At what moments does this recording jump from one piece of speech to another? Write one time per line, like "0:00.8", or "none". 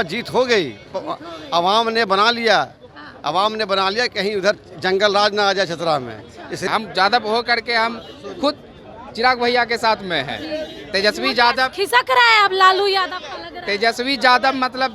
0:06.7